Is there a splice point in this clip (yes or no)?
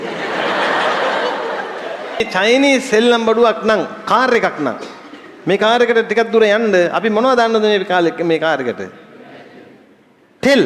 yes